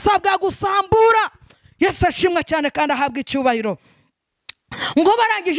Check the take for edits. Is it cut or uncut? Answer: uncut